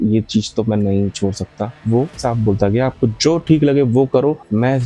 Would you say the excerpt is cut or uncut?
cut